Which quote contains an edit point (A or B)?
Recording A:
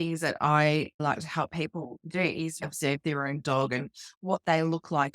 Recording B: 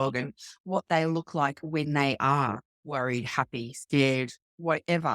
A